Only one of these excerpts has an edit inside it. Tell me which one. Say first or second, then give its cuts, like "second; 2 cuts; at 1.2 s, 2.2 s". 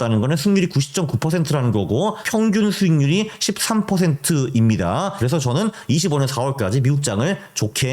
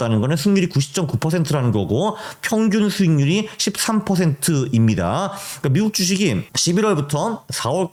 first; 2 cuts; at 2.2 s, 5.2 s